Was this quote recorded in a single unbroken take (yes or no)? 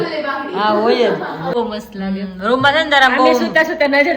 no